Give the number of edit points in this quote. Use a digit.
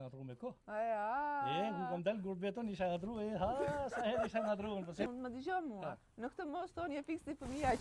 1